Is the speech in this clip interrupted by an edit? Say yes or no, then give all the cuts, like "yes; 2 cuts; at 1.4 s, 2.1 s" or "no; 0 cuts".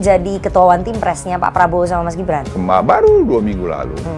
yes; 1 cut; at 2.5 s